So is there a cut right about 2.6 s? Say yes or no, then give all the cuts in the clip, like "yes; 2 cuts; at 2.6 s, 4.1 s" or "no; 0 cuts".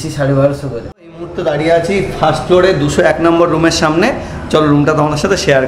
no; 1 cut; at 1.3 s